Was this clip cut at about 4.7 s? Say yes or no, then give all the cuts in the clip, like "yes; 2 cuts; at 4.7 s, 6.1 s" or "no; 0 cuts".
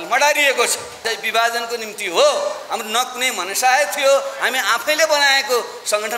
no; 1 cut; at 1.1 s